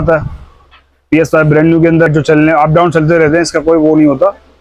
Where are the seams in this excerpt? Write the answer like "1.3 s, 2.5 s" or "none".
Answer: 2.1 s